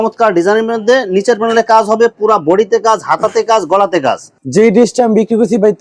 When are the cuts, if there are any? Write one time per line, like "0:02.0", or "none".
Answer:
0:04.4